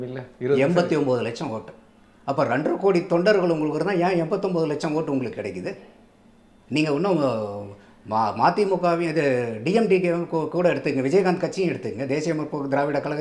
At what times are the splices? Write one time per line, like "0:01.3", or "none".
none